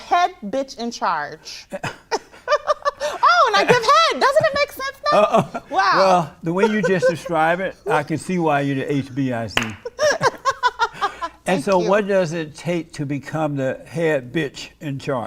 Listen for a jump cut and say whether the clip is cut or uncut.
uncut